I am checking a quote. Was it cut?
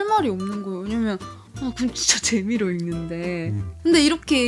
no; 0 cuts

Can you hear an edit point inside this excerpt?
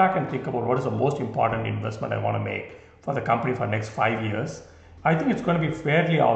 yes; 1 cut; at 4.8 s

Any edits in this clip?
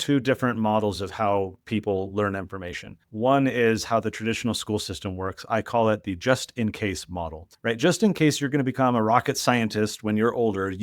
no; 0 cuts

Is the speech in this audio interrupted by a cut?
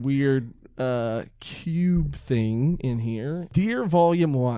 yes; 1 cut; at 3.5 s

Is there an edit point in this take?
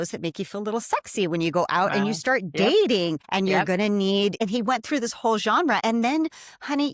yes; 3 cuts; at 3.2 s, 4.4 s, 5.8 s

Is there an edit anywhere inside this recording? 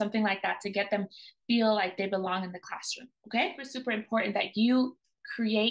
yes; 1 cut; at 3.8 s

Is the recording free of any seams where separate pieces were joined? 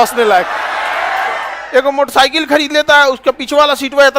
no; 1 cut; at 1.5 s

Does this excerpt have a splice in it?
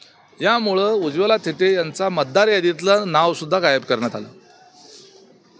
no; 0 cuts

